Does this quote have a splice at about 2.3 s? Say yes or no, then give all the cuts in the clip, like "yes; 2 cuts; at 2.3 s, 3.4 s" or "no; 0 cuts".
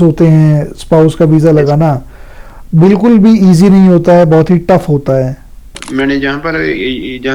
no; 1 cut; at 5.7 s